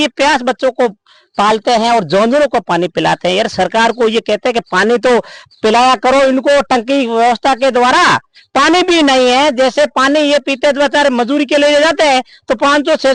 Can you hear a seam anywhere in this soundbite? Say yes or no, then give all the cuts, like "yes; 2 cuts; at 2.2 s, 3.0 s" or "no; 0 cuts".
no; 0 cuts